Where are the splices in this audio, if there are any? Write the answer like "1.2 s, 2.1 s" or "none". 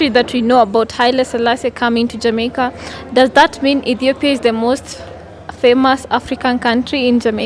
none